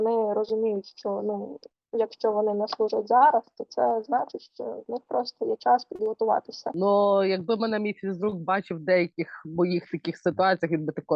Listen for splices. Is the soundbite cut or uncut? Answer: cut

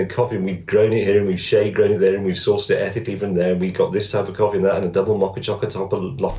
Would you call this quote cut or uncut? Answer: uncut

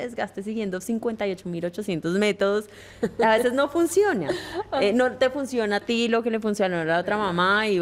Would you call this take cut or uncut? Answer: uncut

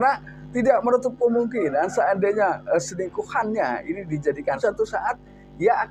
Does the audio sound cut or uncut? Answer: cut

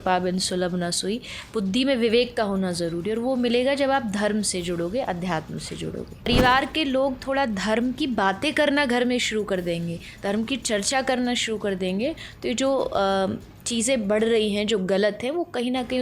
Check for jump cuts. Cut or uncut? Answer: cut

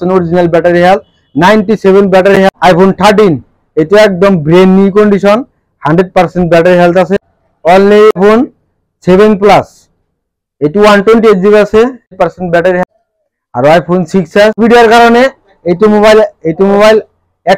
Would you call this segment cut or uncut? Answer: cut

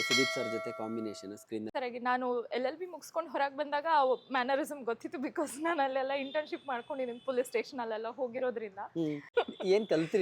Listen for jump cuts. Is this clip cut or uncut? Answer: cut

